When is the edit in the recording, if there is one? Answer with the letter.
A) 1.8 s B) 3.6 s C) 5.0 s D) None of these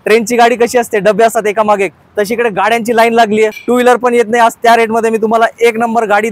B